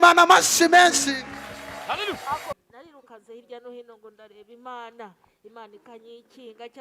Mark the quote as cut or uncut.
cut